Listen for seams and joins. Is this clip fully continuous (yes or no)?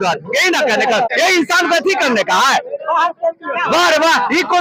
no